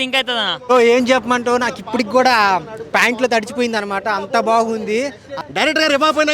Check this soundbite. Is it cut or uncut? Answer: cut